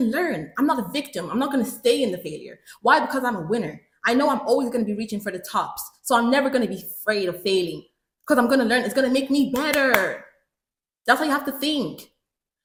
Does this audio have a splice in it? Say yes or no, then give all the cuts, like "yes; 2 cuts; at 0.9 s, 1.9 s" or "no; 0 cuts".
no; 0 cuts